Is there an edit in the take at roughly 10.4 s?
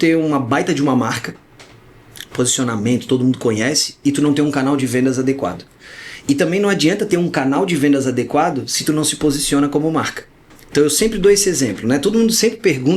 no; 0 cuts

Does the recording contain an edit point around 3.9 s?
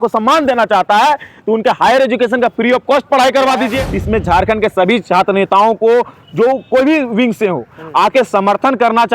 yes; 1 cut; at 3.9 s

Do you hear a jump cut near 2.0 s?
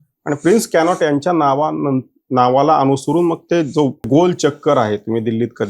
no; 1 cut; at 4.1 s

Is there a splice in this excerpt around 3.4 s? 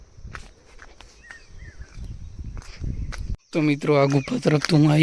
yes; 1 cut; at 3.4 s

